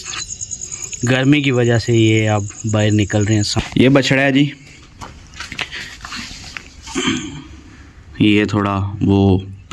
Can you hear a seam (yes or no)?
yes